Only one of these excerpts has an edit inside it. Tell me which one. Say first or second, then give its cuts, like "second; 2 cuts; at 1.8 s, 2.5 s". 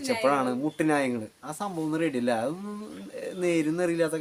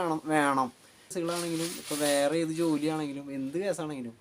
second; 1 cut; at 1.1 s